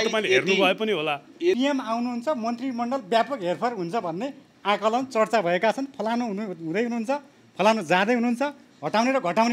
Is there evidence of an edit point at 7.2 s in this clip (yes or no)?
no